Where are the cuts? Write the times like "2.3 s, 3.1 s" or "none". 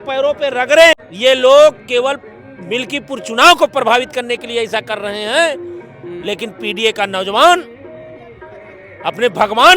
0.9 s

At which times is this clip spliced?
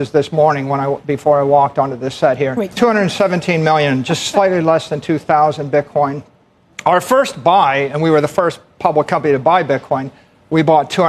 none

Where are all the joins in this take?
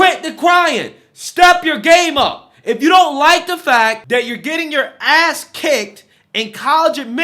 4.0 s

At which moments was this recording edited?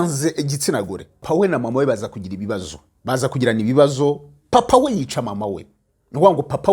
1.2 s

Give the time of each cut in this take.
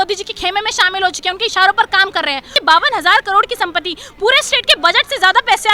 2.5 s

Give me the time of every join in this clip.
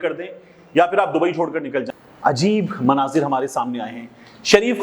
2.0 s

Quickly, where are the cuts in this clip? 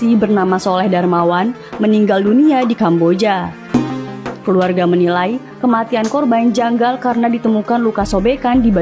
3.7 s

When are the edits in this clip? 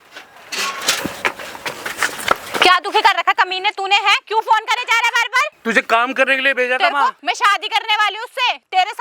1.0 s, 5.5 s, 7.2 s

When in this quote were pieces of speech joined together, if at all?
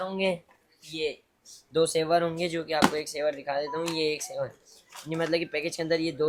none

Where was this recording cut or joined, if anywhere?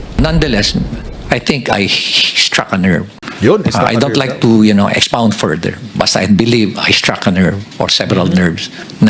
none

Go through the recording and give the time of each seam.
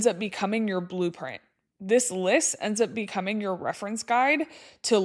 none

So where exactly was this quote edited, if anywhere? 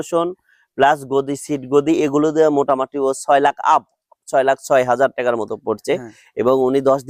none

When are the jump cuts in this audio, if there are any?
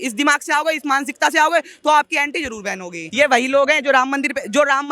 3.0 s

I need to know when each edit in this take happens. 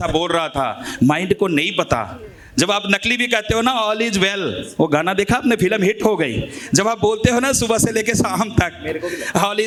none

